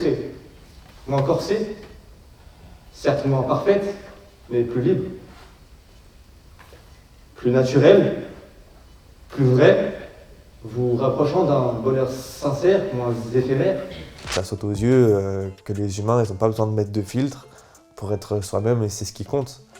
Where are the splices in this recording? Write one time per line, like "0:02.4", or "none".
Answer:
0:14.2